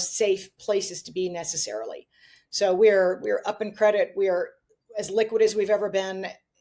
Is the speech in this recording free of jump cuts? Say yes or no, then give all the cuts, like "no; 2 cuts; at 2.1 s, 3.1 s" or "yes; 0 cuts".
yes; 0 cuts